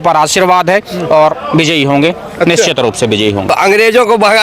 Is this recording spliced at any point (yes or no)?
yes